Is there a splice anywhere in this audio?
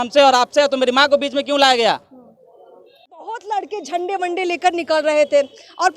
yes; 1 cut; at 3.1 s

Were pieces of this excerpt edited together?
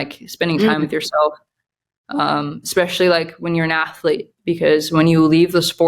no; 0 cuts

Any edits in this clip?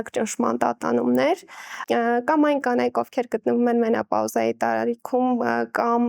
no; 0 cuts

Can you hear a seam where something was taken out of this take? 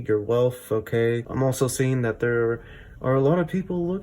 yes; 1 cut; at 1.3 s

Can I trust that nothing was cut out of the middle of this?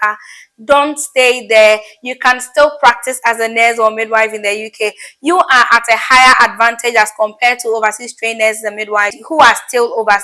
no; 1 cut; at 9.2 s

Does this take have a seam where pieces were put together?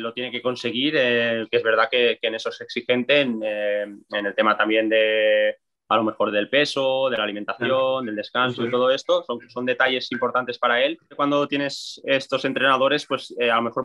yes; 2 cuts; at 1.4 s, 11.1 s

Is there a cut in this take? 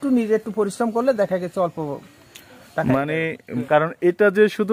yes; 1 cut; at 3.5 s

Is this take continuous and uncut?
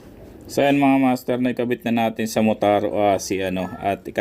yes; 0 cuts

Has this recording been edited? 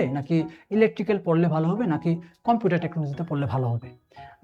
no; 0 cuts

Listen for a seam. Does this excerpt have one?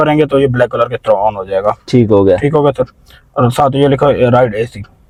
no; 0 cuts

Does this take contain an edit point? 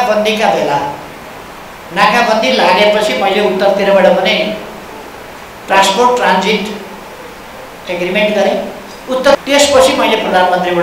yes; 1 cut; at 9.4 s

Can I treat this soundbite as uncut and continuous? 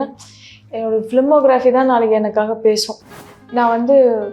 no; 1 cut; at 3.1 s

